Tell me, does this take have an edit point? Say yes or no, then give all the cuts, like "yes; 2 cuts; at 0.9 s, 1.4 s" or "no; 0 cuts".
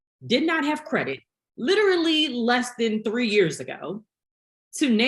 no; 0 cuts